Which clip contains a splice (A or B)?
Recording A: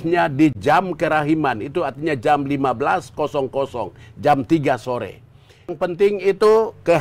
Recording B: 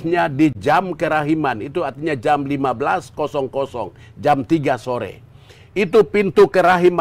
A